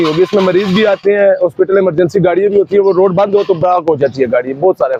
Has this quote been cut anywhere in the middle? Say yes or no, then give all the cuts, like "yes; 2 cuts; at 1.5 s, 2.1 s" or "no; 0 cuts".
no; 0 cuts